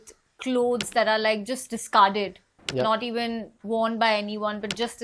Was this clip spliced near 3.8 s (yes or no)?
no